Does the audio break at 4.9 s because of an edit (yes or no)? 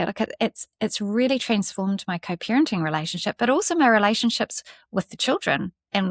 no